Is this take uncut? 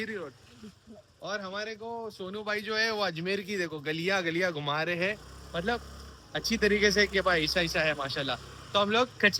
yes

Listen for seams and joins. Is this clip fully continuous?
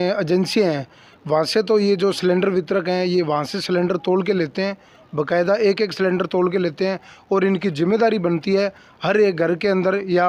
yes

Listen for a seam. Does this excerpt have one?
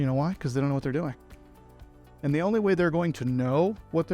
no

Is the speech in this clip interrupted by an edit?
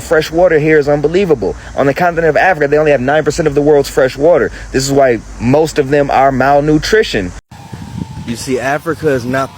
yes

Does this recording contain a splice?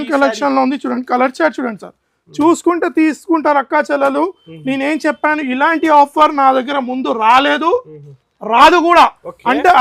no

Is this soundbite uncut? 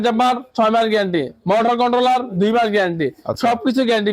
yes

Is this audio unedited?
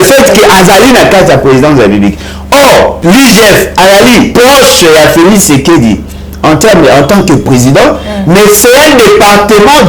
no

